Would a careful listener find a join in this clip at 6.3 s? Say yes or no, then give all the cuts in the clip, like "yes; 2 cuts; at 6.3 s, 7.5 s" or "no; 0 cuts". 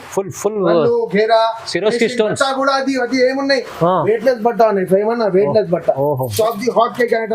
yes; 1 cut; at 6.3 s